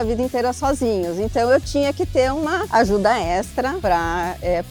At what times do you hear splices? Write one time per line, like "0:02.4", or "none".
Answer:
0:02.6
0:03.8